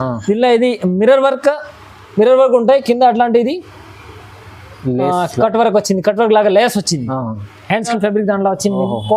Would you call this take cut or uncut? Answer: cut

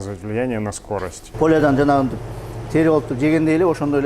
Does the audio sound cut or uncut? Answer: cut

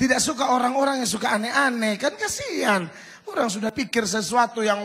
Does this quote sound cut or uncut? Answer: cut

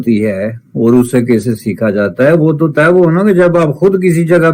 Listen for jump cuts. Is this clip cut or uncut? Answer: uncut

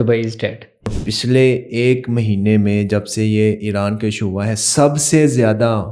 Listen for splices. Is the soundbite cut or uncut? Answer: cut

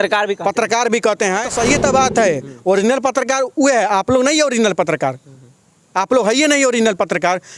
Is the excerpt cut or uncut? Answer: cut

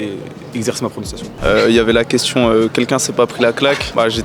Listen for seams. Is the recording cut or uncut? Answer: cut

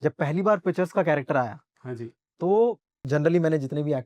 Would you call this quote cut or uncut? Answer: cut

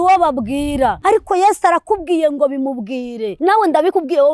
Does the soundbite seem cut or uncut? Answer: cut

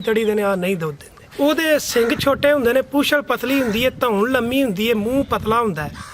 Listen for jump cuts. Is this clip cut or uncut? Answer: cut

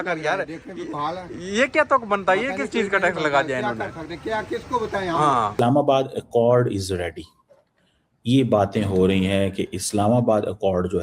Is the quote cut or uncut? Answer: cut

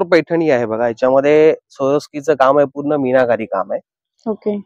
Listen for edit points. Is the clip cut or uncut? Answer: uncut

